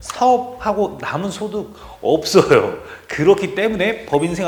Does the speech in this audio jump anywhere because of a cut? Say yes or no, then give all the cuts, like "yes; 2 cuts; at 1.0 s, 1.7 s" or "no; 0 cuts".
no; 0 cuts